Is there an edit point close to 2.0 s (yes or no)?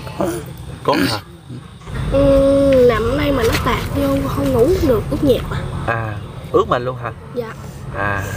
yes